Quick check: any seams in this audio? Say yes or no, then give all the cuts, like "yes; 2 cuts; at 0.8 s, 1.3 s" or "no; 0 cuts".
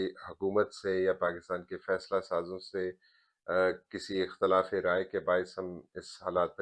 no; 0 cuts